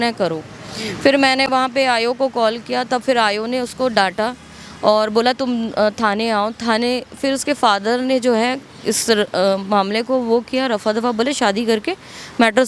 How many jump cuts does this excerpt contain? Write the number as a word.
zero